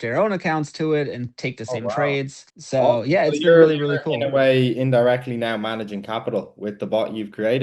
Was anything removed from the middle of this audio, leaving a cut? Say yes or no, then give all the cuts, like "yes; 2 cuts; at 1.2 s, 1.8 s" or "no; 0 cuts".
no; 0 cuts